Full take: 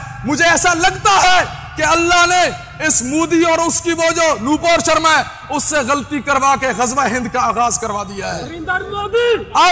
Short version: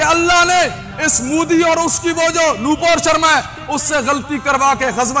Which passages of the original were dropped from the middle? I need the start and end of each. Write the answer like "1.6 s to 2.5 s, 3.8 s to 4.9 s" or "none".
none